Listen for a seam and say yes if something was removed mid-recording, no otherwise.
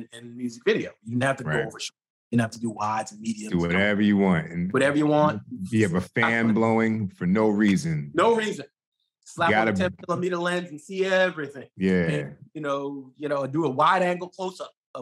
no